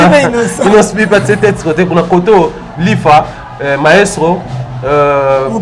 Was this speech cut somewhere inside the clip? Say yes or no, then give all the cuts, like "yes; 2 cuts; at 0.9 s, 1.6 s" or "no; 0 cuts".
no; 0 cuts